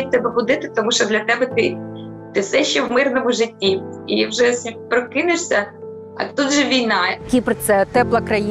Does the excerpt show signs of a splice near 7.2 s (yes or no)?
yes